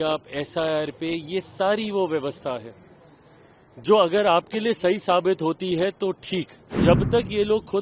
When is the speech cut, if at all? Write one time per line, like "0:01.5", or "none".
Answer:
0:06.6